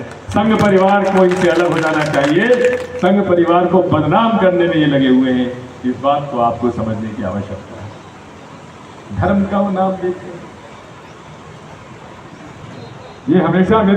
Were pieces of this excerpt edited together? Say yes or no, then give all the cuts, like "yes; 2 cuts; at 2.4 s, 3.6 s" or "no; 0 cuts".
yes; 1 cut; at 12.6 s